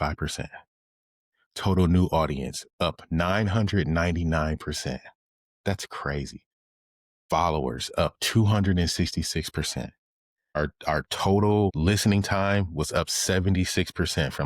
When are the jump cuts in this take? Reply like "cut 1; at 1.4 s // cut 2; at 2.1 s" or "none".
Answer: cut 1; at 10.6 s // cut 2; at 11.7 s